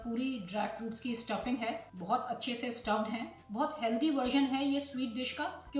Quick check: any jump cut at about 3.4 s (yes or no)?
yes